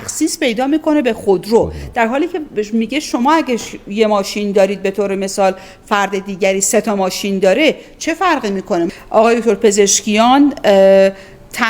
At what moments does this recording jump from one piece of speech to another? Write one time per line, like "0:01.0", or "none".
0:08.9